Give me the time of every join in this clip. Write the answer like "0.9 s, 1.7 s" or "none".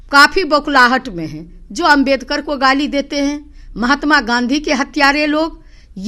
none

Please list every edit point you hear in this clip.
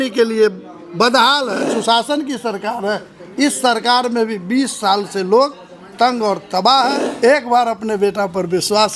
1.7 s, 7.0 s

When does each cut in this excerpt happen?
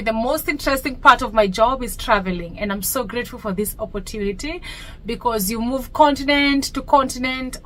none

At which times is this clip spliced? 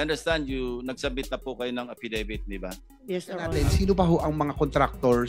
3.6 s

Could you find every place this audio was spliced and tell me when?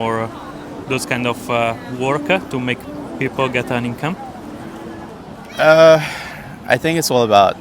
4.9 s

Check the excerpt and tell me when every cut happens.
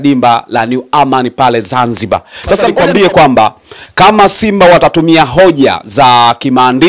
2.7 s

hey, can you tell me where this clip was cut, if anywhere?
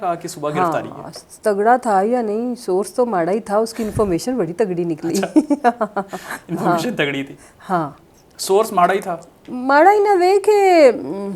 none

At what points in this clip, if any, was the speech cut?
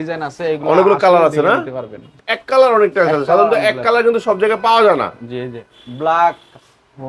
2.2 s

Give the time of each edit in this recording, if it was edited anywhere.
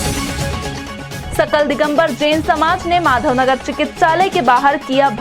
none

